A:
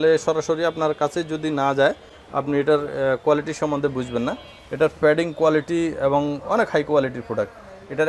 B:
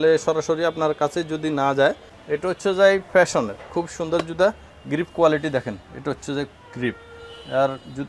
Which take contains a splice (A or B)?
B